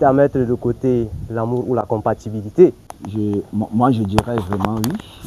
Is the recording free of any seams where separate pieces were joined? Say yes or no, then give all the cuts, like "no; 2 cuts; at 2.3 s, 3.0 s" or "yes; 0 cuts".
yes; 0 cuts